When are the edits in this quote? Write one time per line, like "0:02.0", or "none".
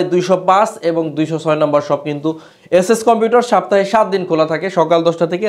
none

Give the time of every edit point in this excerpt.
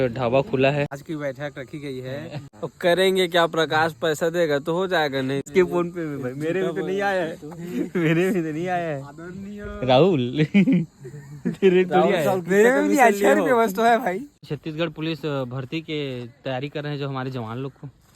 0:01.0
0:02.5
0:05.5
0:14.4

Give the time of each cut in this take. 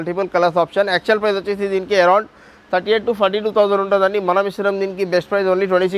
none

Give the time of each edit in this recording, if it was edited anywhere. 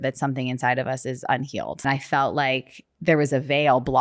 0:01.8

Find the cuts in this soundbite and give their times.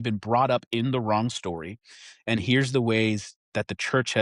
none

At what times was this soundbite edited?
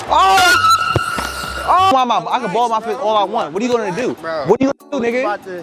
0:01.9

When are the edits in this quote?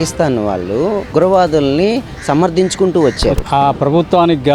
0:01.1
0:03.4

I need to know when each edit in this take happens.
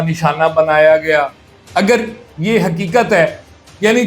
0:01.6

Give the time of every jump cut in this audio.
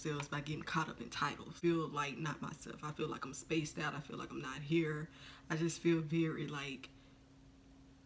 0:01.5

